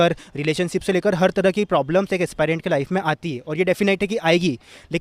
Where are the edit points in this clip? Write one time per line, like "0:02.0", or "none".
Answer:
none